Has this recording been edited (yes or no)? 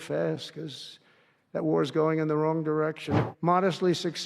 yes